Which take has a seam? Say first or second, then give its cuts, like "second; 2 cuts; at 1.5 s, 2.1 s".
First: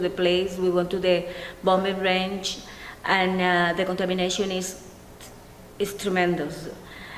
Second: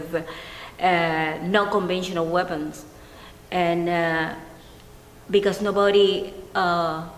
first; 1 cut; at 4.7 s